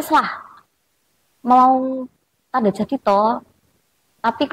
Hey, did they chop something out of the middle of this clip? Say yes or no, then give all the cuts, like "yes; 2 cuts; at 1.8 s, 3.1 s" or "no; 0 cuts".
no; 0 cuts